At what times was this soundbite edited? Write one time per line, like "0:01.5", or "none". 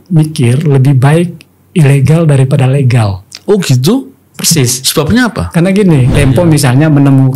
0:06.1